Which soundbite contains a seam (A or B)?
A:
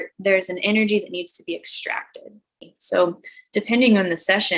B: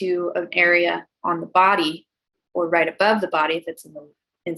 A